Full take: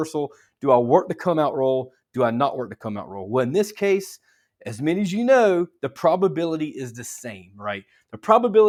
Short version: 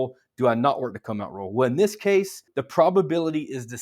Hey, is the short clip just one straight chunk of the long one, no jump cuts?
no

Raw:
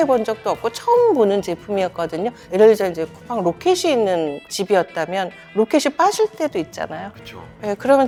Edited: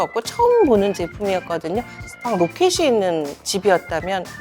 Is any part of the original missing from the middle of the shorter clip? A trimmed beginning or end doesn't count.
yes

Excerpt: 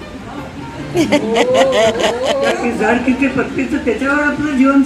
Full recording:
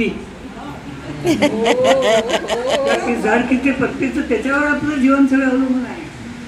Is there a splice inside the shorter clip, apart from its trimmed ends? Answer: yes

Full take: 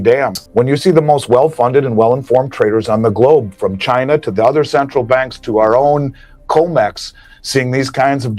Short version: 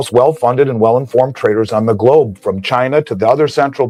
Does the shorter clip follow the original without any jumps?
yes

